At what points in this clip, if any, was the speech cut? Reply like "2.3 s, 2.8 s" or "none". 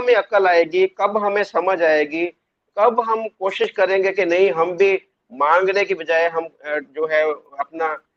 none